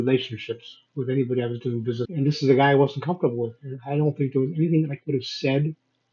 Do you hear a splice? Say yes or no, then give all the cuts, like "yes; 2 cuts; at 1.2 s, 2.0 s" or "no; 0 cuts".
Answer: yes; 1 cut; at 2.1 s